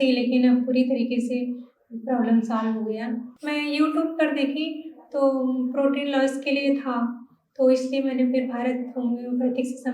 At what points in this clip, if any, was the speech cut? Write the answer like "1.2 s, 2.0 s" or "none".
3.3 s